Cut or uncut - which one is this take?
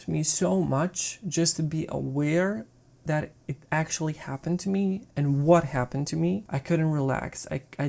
cut